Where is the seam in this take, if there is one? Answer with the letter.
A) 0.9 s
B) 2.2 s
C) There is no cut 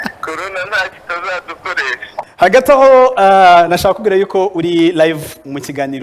B